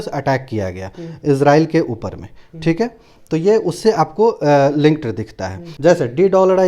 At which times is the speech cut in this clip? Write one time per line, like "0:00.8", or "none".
0:05.7

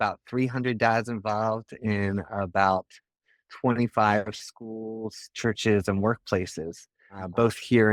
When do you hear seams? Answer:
none

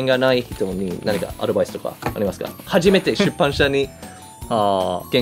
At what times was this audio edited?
none

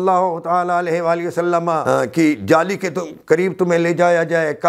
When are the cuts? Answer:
0:01.8

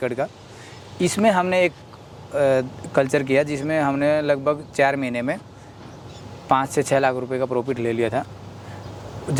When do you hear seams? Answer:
none

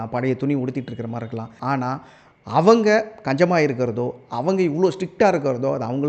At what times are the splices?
0:01.5

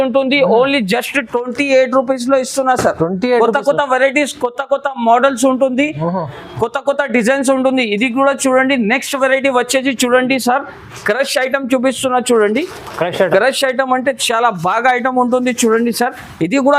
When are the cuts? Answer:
none

